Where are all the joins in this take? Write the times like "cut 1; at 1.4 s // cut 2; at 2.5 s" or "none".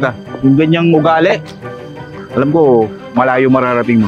none